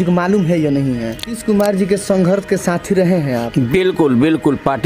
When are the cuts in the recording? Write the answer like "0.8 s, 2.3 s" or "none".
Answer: 1.4 s